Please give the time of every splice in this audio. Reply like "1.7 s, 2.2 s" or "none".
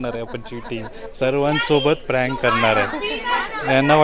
none